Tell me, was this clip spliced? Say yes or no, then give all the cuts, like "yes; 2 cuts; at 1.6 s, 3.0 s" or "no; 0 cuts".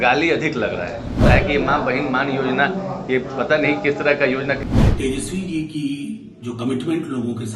yes; 2 cuts; at 1.2 s, 4.6 s